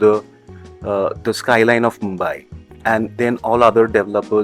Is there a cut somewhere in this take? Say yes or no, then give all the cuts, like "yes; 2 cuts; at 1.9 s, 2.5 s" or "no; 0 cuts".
no; 0 cuts